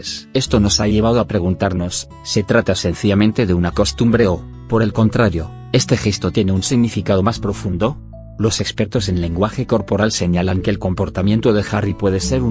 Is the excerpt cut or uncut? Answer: cut